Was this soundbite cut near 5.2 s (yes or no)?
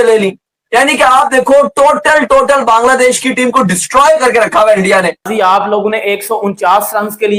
yes